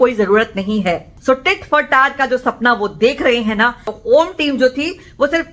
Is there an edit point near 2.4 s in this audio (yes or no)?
no